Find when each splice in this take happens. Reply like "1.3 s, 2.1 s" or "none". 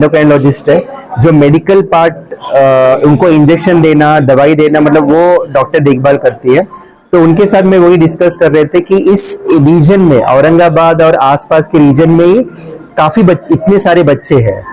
none